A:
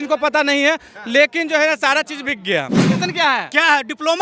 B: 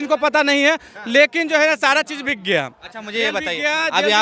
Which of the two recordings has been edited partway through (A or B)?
A